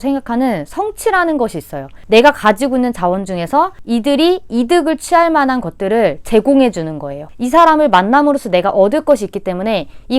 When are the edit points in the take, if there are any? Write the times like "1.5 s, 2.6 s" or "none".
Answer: 1.9 s, 7.2 s